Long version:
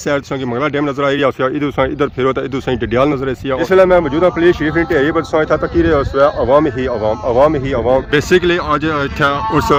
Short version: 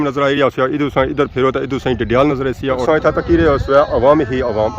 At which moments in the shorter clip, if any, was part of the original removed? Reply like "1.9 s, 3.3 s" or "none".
2.8 s